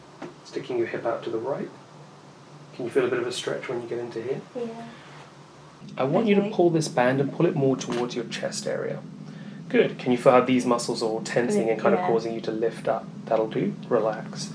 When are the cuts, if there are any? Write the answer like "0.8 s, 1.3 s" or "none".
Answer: 5.8 s